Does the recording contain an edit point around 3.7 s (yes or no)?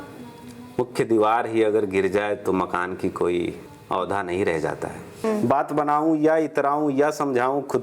yes